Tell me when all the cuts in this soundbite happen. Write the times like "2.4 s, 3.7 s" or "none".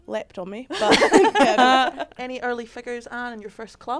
2.1 s